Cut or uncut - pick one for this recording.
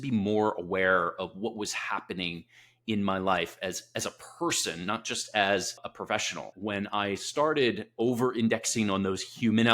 cut